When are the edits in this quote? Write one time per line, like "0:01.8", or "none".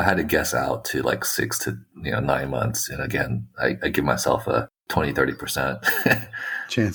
none